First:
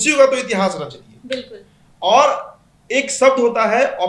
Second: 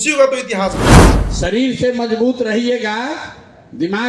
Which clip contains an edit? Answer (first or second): second